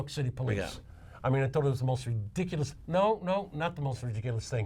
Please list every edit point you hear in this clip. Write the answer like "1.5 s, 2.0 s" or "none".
2.7 s